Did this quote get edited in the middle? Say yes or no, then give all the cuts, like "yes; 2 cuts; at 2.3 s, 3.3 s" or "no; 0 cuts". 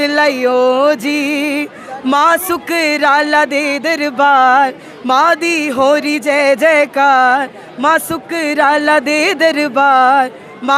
no; 0 cuts